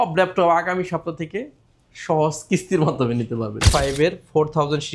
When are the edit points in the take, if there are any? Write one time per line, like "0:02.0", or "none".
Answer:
0:03.6